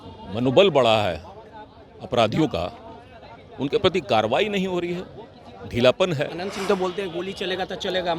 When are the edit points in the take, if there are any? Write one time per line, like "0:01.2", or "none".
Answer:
0:06.4